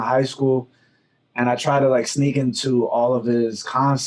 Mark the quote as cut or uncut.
uncut